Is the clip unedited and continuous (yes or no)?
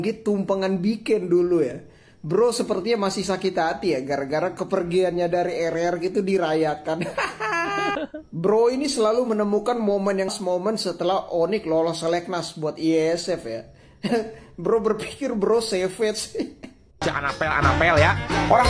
no